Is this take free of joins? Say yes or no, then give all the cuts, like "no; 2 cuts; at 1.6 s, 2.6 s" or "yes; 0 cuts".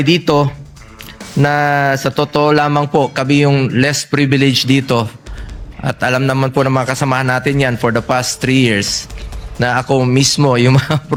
yes; 0 cuts